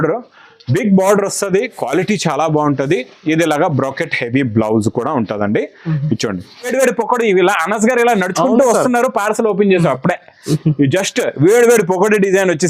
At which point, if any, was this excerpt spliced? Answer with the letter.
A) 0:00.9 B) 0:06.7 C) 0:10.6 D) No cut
B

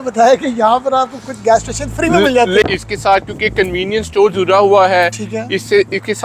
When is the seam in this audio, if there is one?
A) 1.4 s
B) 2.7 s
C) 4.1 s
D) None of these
B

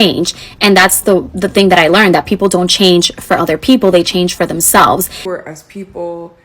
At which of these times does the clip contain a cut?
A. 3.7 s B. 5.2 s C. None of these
B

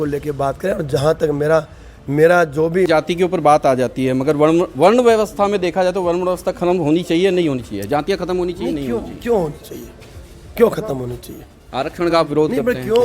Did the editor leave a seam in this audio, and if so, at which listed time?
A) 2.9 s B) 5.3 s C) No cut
A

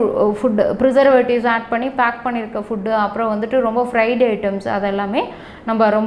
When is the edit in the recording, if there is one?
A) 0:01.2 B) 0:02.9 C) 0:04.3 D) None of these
D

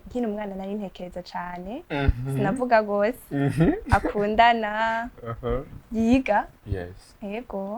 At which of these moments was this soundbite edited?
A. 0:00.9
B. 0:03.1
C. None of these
C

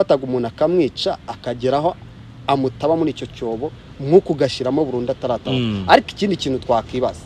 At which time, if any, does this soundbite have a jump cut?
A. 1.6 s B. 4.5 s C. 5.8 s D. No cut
D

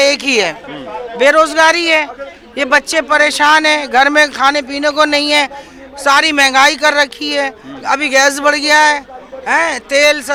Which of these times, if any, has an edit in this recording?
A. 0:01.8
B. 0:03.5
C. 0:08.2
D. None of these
D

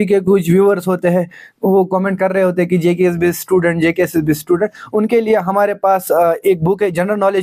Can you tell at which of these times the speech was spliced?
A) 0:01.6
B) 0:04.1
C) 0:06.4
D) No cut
D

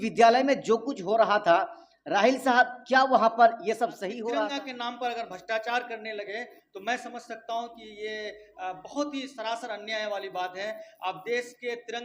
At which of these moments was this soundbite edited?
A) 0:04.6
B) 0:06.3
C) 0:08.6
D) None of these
A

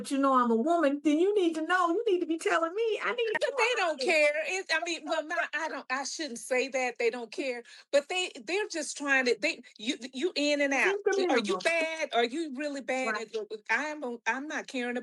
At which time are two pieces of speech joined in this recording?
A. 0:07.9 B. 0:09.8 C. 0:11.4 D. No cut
D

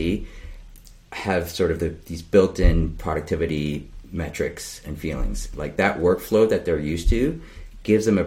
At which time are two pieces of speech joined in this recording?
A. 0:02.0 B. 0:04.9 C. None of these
C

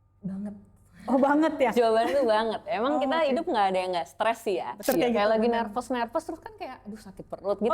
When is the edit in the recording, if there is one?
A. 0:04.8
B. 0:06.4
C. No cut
A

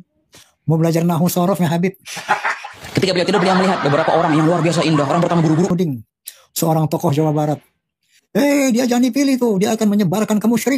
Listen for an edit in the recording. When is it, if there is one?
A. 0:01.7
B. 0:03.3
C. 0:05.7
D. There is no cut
C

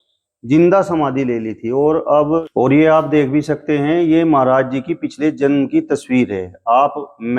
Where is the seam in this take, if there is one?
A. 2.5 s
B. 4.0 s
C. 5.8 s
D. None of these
A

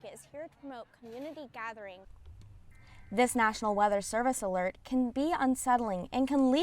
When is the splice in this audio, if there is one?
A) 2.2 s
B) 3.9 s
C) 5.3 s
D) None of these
A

